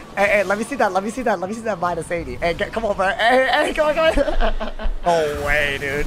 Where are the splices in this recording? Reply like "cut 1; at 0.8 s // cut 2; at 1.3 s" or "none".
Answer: cut 1; at 5.1 s

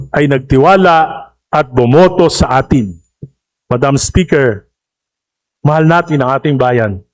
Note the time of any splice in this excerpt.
none

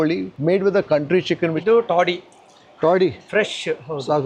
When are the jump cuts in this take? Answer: cut 1; at 1.5 s

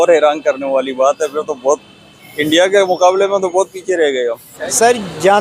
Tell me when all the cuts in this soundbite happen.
cut 1; at 4.5 s

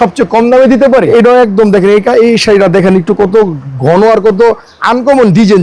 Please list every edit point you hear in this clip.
cut 1; at 1.1 s

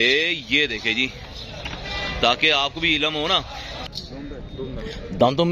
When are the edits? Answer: cut 1; at 3.8 s

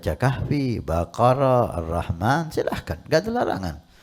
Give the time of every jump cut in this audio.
none

